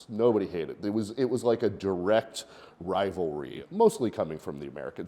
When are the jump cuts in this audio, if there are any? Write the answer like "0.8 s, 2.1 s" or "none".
3.6 s